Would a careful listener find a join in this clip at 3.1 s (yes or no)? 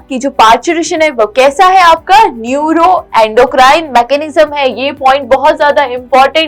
no